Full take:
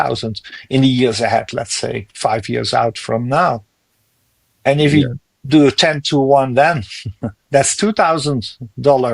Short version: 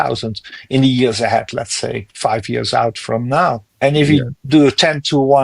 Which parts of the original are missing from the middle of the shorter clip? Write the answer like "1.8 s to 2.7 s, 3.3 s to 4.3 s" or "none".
3.7 s to 4.5 s, 5.2 s to 5.4 s